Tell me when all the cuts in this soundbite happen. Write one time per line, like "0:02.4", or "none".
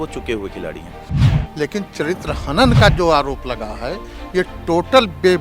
0:01.2